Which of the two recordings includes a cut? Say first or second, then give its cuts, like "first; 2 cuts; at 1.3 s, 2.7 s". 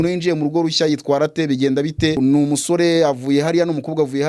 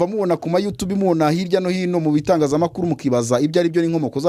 first; 1 cut; at 2.2 s